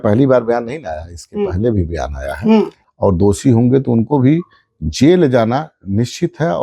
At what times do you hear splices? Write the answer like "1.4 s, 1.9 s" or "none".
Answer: 2.8 s